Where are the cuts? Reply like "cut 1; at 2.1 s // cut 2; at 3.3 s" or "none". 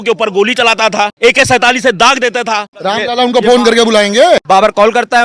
cut 1; at 1.1 s // cut 2; at 2.7 s // cut 3; at 4.4 s